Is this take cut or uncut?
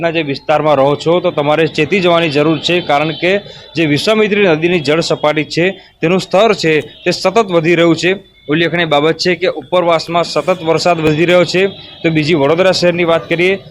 cut